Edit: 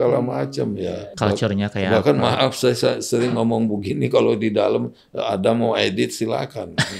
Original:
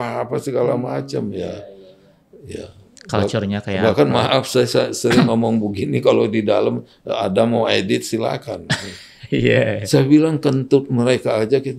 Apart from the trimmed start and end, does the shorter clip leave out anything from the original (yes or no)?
yes